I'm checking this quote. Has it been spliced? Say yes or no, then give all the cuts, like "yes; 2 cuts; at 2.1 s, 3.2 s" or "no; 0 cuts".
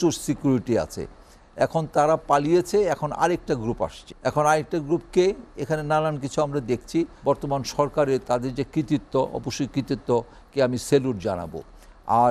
yes; 2 cuts; at 4.1 s, 7.1 s